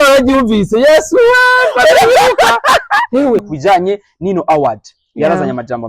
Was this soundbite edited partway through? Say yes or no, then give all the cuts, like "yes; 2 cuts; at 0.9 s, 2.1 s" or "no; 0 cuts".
yes; 1 cut; at 3.4 s